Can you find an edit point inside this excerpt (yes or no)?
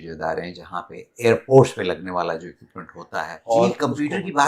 yes